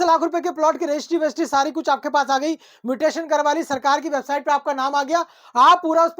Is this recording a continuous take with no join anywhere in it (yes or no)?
yes